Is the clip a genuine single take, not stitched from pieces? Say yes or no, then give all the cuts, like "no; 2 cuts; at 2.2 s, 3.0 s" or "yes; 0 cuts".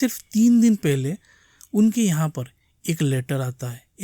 yes; 0 cuts